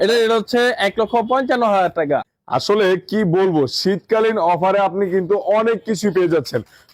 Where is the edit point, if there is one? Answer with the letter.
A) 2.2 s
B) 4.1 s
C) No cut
A